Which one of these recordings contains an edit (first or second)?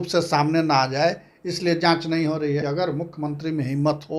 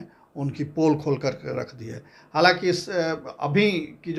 first